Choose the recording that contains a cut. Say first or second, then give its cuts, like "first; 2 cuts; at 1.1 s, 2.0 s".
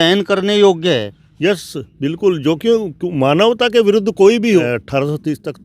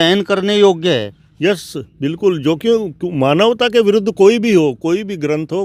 first; 1 cut; at 4.6 s